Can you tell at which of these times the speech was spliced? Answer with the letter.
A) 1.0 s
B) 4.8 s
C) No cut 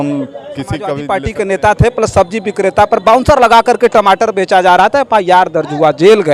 A